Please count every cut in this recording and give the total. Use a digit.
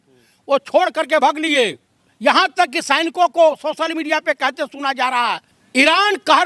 2